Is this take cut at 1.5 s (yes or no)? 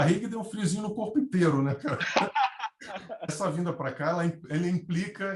no